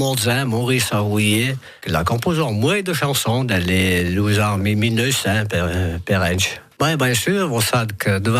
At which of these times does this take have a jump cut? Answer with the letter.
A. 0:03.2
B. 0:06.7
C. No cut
B